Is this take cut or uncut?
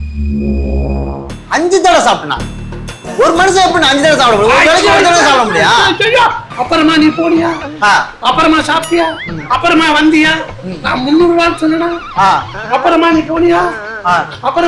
cut